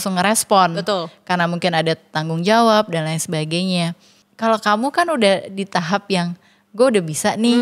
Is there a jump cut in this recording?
no; 0 cuts

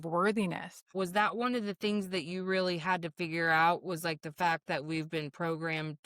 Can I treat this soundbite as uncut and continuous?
no; 1 cut; at 0.9 s

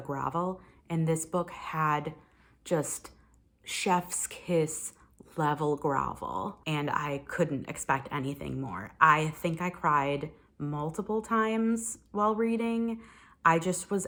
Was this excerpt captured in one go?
yes; 0 cuts

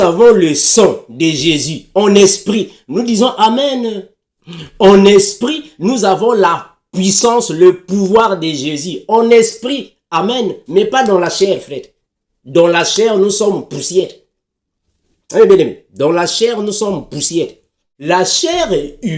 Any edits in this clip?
yes; 1 cut; at 17.9 s

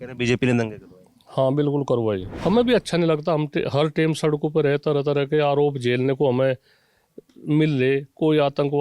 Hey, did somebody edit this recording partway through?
yes; 1 cut; at 2.3 s

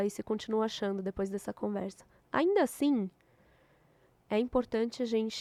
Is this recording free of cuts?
yes; 0 cuts

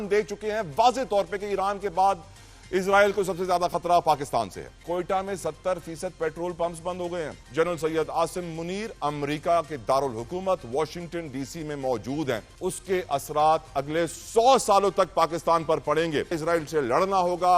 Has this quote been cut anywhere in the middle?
yes; 4 cuts; at 4.7 s, 7.4 s, 12.5 s, 16.4 s

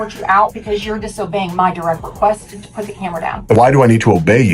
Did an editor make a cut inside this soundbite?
yes; 1 cut; at 3.6 s

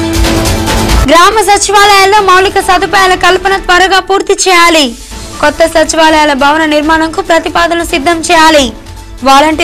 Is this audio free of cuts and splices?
no; 1 cut; at 0.9 s

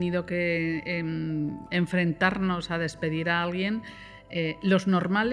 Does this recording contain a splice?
no; 0 cuts

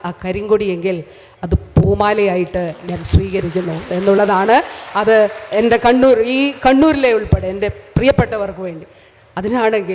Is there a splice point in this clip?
no; 0 cuts

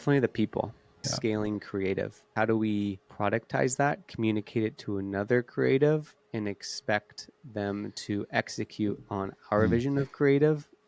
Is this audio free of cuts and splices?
no; 3 cuts; at 1.0 s, 2.3 s, 3.1 s

